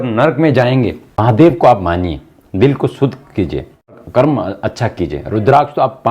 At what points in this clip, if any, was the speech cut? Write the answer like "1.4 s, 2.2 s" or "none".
1.2 s, 3.9 s